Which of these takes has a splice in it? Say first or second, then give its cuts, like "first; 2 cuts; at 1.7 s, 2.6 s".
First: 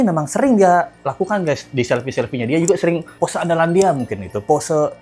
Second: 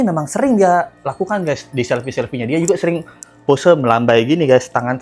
first; 1 cut; at 3.1 s